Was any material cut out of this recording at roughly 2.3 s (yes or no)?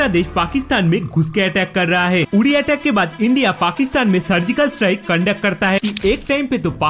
yes